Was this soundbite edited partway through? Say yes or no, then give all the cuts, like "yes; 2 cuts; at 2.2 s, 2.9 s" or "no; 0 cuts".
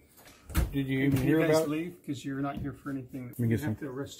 yes; 1 cut; at 3.3 s